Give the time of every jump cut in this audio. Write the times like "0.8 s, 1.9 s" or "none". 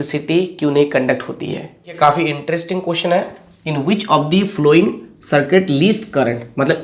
2.0 s